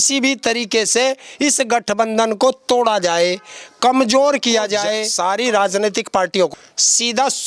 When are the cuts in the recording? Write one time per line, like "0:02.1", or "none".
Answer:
0:05.1
0:06.5